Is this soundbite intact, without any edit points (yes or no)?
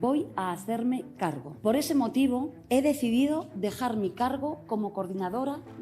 no